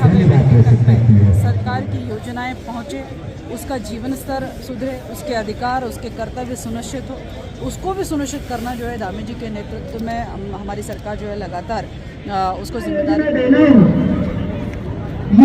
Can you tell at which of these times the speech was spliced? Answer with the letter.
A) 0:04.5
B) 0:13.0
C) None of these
B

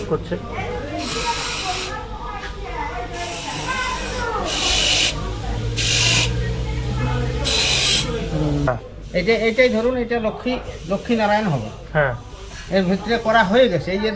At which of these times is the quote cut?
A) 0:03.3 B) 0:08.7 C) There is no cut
B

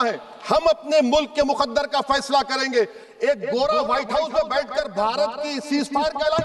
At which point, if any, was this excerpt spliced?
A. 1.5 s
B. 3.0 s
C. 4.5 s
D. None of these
D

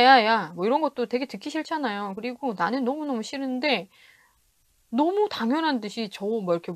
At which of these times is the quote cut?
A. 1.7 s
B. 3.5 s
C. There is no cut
C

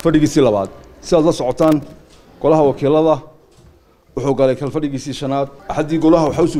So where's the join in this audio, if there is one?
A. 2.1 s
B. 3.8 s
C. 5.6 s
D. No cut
C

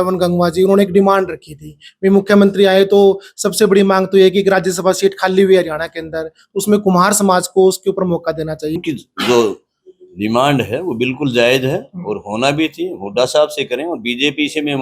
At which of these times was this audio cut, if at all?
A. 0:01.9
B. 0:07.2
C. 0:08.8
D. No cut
C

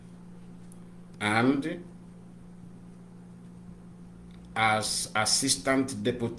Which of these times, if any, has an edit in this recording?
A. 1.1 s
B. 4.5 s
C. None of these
A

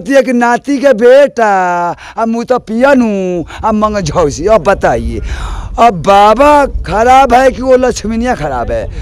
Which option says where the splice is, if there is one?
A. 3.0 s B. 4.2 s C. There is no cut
C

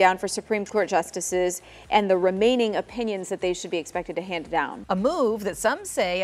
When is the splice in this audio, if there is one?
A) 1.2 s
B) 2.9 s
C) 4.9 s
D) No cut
C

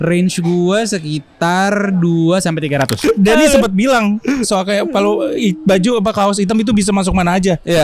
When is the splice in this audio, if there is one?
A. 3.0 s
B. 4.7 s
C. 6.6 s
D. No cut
A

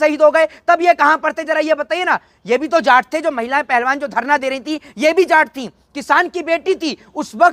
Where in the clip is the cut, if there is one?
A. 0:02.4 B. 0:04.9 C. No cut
C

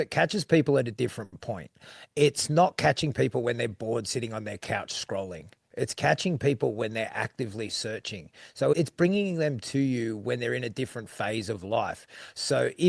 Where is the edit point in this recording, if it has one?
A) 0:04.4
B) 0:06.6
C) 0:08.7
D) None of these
C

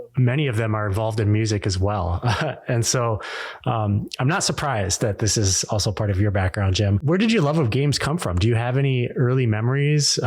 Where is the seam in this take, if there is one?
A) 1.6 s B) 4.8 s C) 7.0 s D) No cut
C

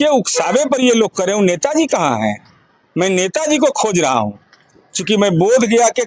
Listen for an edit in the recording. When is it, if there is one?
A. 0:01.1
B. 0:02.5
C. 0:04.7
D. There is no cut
D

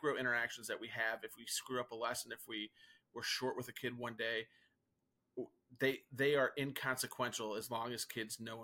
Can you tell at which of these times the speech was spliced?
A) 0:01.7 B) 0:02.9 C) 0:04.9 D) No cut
D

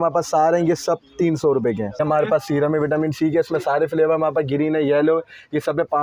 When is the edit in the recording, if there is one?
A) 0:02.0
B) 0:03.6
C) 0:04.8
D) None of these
A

